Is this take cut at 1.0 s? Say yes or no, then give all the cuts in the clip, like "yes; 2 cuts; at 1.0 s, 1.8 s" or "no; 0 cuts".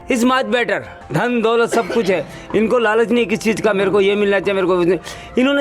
yes; 1 cut; at 1.0 s